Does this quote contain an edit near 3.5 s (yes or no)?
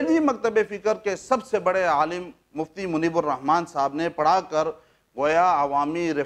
no